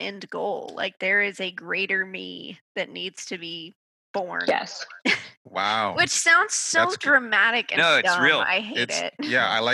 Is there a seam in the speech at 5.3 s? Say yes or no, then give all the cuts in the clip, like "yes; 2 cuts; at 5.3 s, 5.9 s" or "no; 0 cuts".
no; 0 cuts